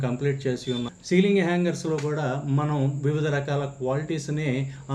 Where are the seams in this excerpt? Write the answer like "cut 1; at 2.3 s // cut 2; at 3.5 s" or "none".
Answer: cut 1; at 0.9 s